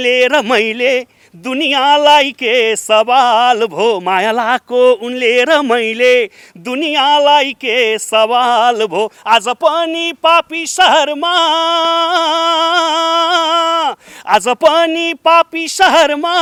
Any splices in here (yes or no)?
no